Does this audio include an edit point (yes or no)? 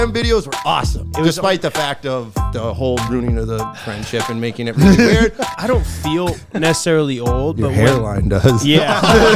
yes